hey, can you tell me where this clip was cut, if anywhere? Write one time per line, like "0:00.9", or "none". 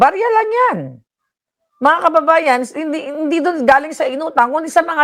none